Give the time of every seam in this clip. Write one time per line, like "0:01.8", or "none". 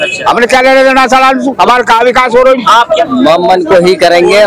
0:03.0